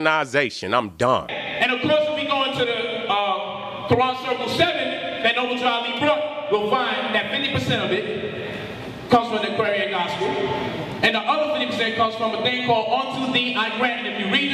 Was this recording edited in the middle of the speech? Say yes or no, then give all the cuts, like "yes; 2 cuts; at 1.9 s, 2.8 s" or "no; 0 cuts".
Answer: no; 0 cuts